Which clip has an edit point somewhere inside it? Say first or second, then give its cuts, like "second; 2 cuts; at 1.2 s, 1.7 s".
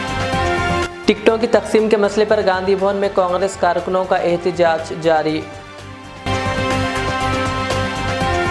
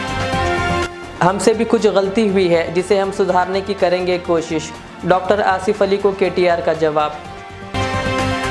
first; 1 cut; at 0.9 s